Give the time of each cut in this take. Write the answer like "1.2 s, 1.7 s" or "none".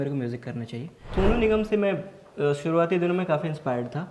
1.0 s

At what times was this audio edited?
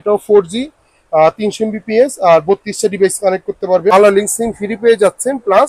3.9 s

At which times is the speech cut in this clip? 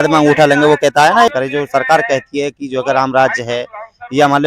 1.3 s

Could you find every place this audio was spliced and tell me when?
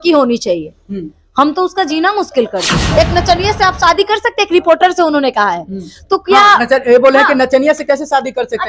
2.7 s

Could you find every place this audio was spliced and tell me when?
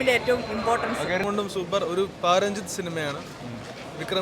1.2 s

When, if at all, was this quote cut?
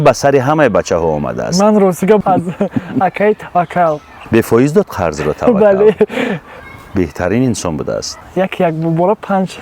2.2 s, 4.2 s, 8.2 s

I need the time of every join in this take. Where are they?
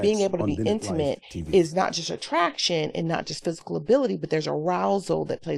none

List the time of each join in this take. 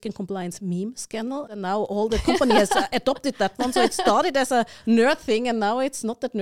1.5 s

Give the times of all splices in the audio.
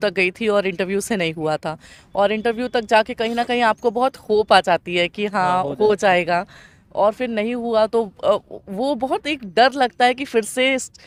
none

